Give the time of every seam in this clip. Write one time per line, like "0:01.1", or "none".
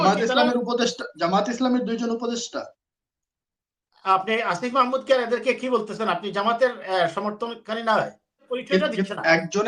0:08.5